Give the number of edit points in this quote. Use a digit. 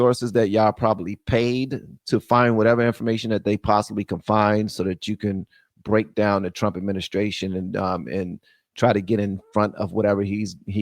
0